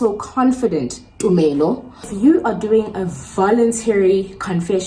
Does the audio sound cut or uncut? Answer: cut